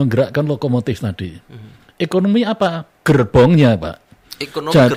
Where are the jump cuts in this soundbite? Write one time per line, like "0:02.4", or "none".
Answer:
none